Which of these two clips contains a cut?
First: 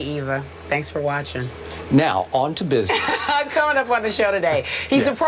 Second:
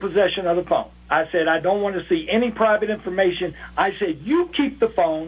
first; 1 cut; at 3.0 s

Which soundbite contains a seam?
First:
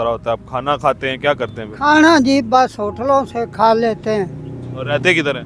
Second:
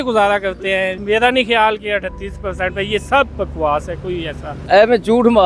second; 2 cuts; at 1.0 s, 4.7 s

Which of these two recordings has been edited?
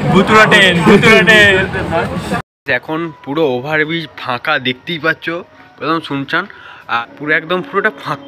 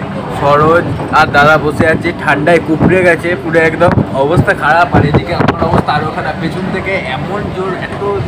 first; 2 cuts; at 2.4 s, 7.0 s

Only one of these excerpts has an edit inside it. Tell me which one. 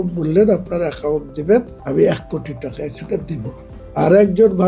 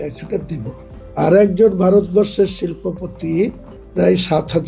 first; 1 cut; at 1.8 s

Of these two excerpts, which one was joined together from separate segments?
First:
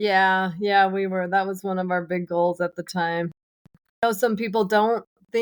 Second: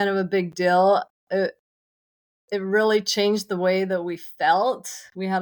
first; 1 cut; at 4.0 s

